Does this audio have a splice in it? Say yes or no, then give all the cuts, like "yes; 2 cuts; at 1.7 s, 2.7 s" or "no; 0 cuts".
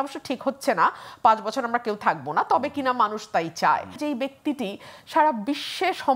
yes; 1 cut; at 4.0 s